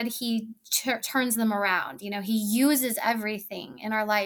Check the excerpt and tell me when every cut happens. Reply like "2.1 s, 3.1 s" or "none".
none